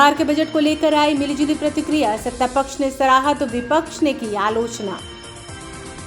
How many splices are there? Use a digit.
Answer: 1